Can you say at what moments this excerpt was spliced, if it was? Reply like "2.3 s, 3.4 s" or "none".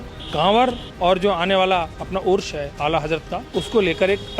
2.7 s, 3.5 s